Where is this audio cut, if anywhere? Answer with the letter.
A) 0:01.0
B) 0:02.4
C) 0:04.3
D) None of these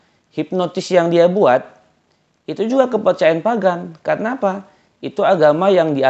D